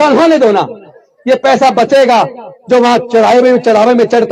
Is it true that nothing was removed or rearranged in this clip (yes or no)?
yes